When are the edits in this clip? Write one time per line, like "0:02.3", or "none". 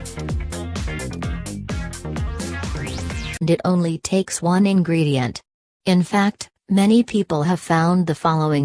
none